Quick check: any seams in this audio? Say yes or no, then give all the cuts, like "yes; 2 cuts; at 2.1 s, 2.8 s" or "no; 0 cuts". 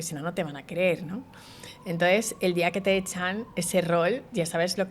no; 0 cuts